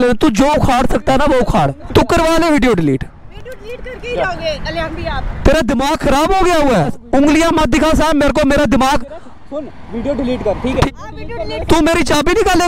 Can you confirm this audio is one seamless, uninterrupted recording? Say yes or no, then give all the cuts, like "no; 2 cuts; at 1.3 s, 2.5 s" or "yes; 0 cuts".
no; 3 cuts; at 1.8 s, 7.0 s, 10.9 s